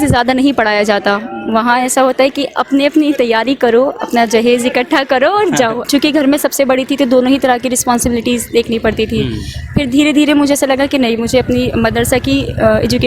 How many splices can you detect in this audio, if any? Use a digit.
1